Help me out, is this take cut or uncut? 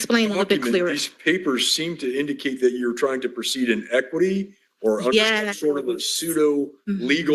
uncut